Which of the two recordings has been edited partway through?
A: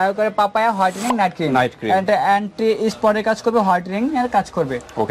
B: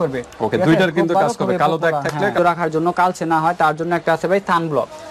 B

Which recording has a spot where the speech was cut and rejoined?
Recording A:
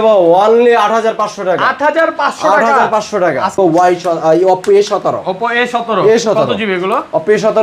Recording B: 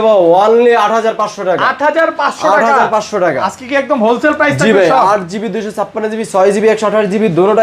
A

